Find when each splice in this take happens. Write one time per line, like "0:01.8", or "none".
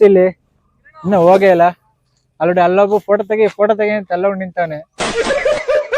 0:05.0